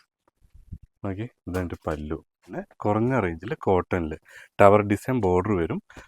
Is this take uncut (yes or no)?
no